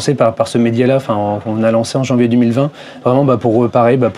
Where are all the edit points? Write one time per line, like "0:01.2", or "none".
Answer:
none